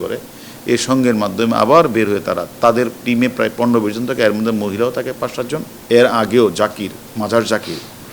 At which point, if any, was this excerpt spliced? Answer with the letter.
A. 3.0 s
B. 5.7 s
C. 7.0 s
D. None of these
B